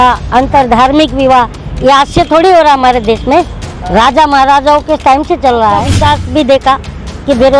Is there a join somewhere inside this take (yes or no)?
yes